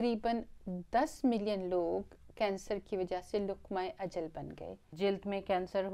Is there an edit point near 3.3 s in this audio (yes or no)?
no